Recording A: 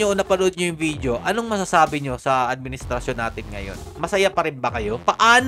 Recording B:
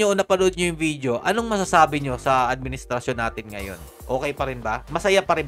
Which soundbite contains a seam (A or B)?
A